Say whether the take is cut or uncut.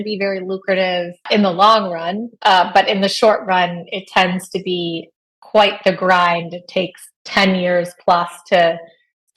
cut